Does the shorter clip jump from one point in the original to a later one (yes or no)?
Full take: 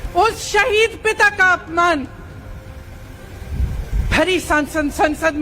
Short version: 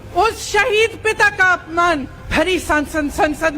yes